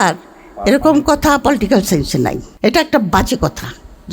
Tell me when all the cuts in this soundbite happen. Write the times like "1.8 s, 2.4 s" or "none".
2.5 s